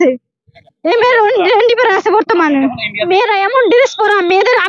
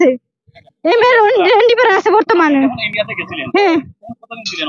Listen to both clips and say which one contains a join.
first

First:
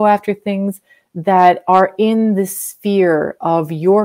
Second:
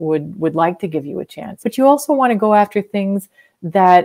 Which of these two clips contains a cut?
second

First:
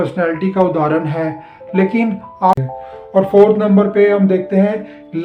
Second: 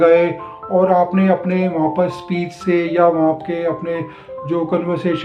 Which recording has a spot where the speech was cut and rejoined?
first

